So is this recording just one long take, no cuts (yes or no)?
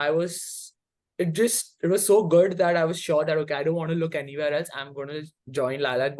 yes